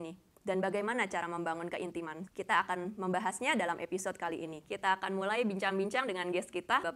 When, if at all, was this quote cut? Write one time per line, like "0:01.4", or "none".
none